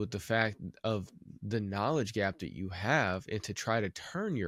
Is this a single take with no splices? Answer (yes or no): yes